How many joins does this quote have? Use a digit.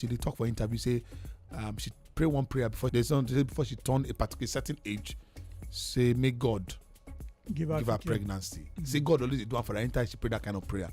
1